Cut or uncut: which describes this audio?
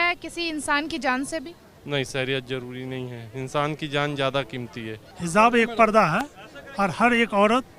cut